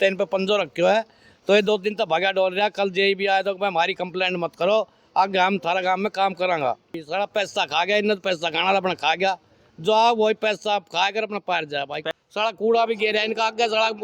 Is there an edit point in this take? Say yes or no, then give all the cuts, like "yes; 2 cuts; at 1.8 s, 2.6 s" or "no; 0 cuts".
yes; 2 cuts; at 7.1 s, 12.0 s